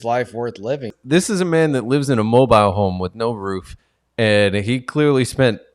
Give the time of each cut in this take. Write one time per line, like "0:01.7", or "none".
0:01.0